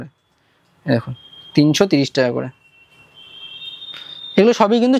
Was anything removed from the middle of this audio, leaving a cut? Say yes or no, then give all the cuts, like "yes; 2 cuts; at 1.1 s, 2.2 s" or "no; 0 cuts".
no; 0 cuts